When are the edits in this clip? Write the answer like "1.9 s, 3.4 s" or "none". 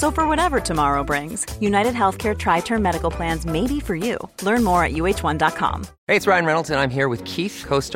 5.9 s